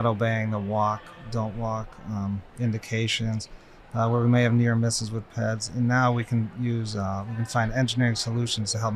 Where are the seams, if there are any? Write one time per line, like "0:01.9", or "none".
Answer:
0:02.5